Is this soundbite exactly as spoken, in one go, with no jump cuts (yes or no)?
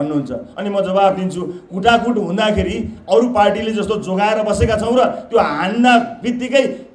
yes